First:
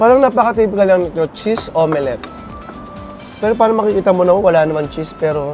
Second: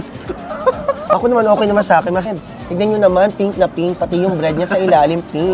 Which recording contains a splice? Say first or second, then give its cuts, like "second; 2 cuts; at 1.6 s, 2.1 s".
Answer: second; 1 cut; at 2.3 s